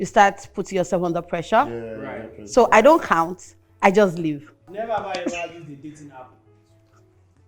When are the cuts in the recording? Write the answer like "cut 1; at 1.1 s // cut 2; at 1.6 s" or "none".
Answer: cut 1; at 4.7 s